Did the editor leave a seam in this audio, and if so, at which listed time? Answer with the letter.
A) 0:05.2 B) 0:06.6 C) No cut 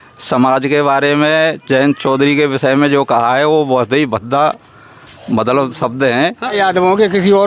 B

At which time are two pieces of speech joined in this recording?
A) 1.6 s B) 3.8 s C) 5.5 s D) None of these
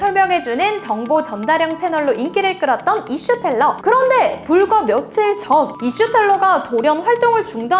B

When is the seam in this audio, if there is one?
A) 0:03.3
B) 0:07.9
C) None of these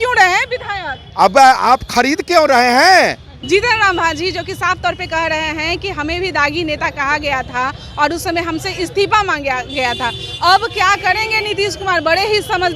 A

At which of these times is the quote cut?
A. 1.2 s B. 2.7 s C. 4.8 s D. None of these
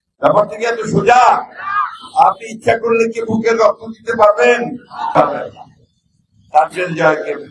D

